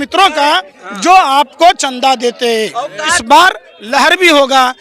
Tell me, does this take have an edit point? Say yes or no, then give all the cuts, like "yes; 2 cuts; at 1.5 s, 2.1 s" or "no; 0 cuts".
yes; 1 cut; at 3.1 s